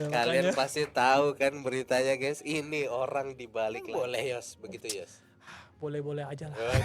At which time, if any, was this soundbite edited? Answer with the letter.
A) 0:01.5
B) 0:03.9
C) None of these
B